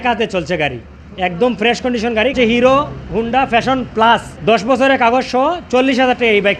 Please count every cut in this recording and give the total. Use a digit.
2